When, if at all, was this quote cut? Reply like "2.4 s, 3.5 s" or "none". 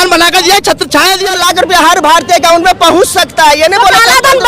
1.3 s